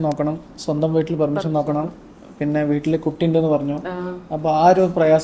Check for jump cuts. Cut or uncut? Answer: uncut